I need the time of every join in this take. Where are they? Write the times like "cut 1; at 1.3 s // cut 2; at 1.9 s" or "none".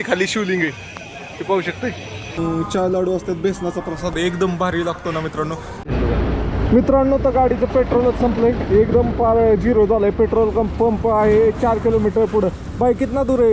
cut 1; at 2.4 s // cut 2; at 5.8 s